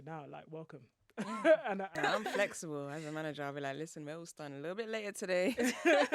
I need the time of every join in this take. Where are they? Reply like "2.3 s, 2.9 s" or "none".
2.0 s

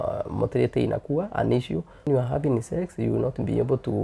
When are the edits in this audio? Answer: 2.1 s

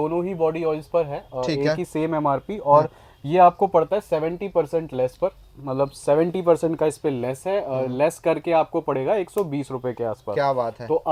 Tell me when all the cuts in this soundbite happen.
none

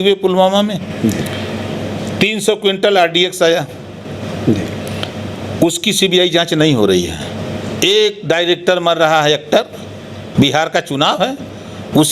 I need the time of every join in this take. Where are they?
none

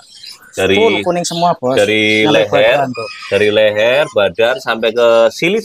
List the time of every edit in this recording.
none

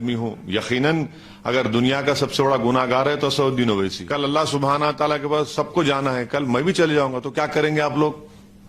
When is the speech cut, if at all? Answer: 4.0 s

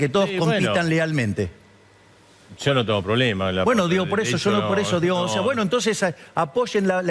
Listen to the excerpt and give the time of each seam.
none

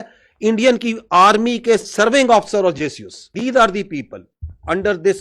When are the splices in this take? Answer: 3.2 s

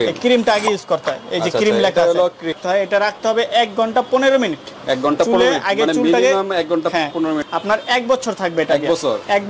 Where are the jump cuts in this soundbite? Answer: 2.6 s, 7.4 s

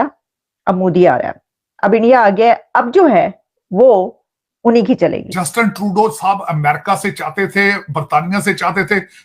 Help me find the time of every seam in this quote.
5.3 s

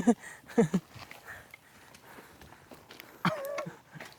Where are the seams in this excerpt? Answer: none

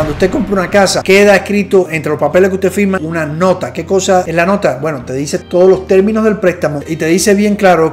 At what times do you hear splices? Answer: 1.0 s, 4.3 s

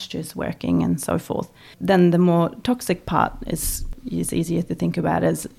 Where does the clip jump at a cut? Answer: 1.7 s, 3.8 s

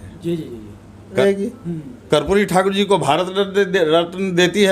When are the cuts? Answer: 1.2 s

